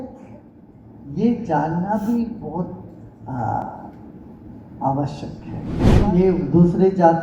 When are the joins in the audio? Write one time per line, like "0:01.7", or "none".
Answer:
0:05.8